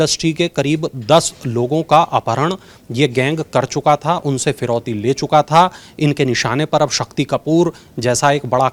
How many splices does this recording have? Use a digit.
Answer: 0